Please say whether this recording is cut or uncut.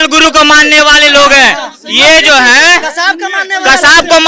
uncut